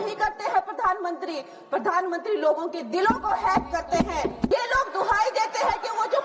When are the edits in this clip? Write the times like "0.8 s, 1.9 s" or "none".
4.5 s